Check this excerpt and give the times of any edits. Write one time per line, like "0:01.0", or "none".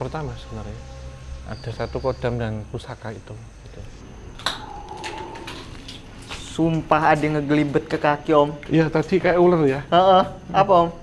0:04.0